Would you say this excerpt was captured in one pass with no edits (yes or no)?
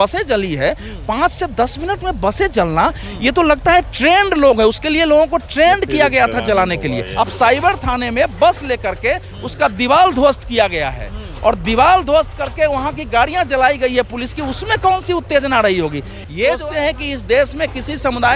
no